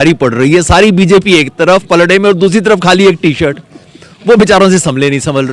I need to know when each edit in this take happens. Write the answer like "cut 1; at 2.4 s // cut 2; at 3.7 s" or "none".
none